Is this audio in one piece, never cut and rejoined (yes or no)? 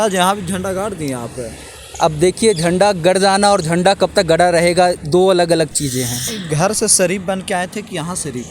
no